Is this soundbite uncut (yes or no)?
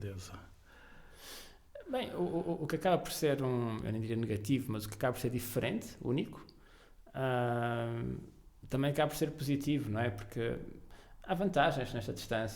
yes